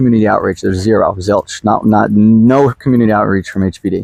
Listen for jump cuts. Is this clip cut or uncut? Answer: uncut